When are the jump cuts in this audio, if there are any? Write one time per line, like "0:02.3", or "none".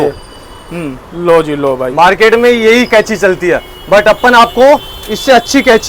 none